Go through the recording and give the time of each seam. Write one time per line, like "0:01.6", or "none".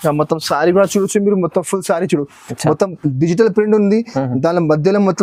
none